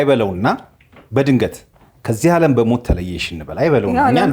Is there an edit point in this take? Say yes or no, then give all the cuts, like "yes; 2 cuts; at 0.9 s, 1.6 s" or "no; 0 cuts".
no; 0 cuts